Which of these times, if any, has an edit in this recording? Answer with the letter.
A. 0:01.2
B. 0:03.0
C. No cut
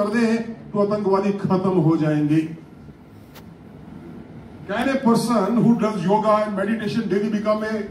C